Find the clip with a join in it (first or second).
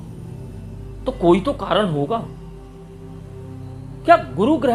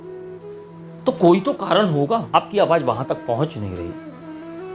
second